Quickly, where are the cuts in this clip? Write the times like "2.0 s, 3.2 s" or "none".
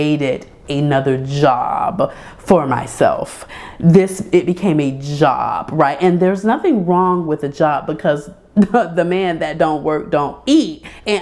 none